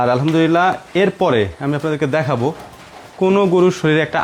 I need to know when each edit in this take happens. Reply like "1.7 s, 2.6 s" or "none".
none